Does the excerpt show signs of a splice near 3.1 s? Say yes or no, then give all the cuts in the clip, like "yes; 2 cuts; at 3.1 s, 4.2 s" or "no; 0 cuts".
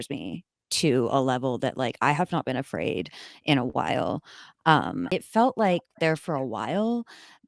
no; 1 cut; at 5.1 s